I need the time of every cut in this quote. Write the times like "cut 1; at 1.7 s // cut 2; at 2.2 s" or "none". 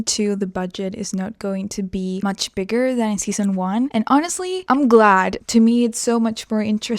cut 1; at 2.2 s // cut 2; at 3.9 s // cut 3; at 4.6 s // cut 4; at 5.4 s